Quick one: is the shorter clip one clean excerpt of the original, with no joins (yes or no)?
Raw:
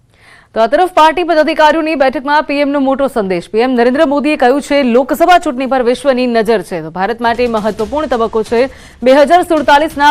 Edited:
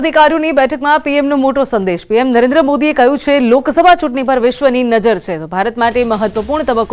yes